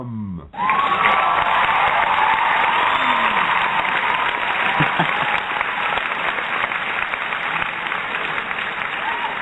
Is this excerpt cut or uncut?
uncut